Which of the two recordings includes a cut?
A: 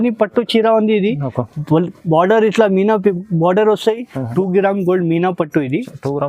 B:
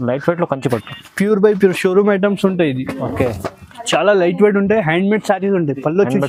A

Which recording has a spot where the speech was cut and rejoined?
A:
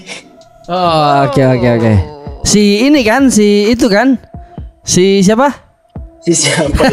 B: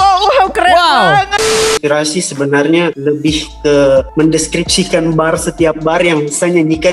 B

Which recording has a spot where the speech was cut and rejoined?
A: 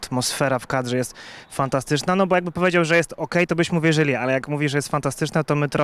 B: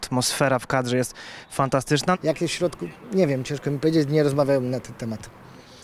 B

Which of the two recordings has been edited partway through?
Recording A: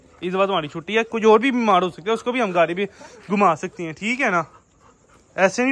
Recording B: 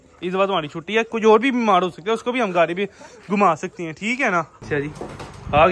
B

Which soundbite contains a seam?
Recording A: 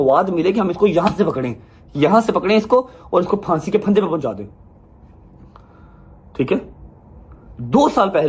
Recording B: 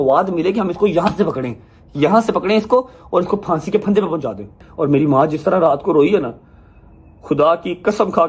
B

